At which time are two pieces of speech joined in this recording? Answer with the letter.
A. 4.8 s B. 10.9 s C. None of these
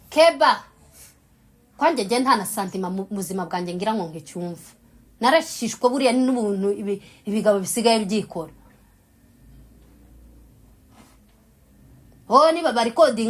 C